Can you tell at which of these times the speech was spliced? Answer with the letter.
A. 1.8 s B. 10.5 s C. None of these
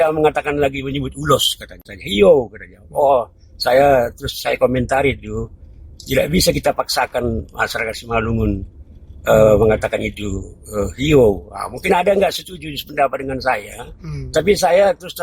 A